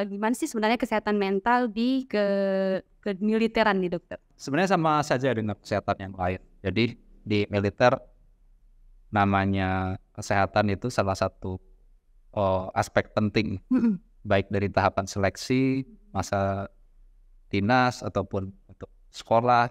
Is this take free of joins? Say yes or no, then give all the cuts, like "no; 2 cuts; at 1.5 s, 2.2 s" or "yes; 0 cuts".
no; 1 cut; at 4.3 s